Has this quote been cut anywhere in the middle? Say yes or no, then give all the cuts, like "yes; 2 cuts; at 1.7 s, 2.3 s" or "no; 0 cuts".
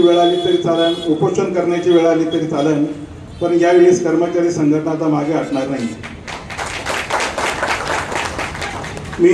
no; 0 cuts